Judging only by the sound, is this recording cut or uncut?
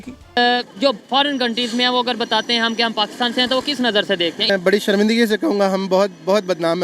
cut